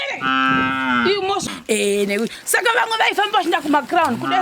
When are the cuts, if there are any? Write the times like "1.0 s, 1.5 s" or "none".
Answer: 1.4 s